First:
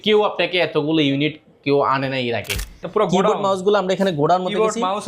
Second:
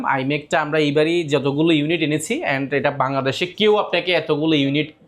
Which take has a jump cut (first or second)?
first